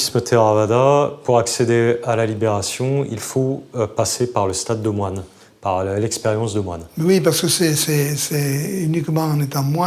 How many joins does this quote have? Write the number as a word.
zero